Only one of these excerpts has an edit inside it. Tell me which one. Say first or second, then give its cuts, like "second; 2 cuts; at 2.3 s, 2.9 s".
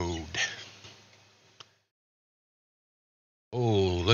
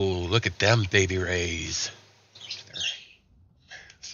second; 1 cut; at 2.8 s